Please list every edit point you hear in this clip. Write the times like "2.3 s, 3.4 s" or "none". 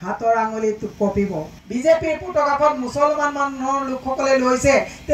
1.5 s